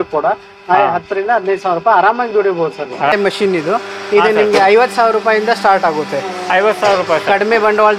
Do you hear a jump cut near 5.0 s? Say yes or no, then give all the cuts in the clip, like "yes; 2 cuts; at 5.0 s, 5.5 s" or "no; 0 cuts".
no; 1 cut; at 3.1 s